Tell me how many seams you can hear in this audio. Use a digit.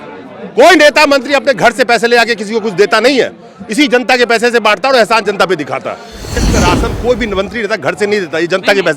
1